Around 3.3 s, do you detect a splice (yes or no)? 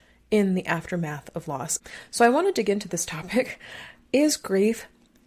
no